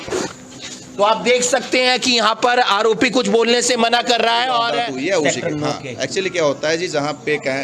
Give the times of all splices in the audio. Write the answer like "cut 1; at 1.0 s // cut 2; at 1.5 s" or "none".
cut 1; at 4.8 s